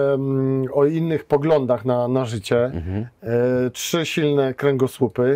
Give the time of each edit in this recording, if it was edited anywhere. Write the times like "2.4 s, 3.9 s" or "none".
none